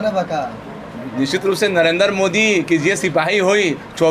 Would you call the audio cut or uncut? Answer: uncut